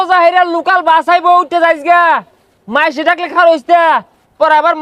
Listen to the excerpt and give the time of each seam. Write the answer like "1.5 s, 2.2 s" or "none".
none